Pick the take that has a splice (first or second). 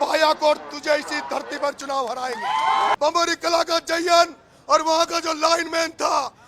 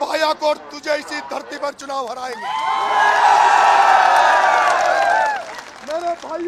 first